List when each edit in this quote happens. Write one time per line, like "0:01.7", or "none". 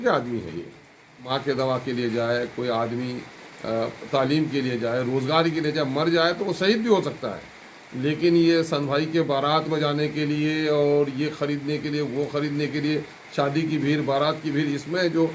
0:01.3